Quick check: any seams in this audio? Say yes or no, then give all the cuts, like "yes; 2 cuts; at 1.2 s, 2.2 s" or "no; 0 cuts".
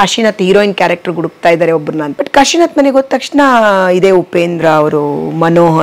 yes; 1 cut; at 2.1 s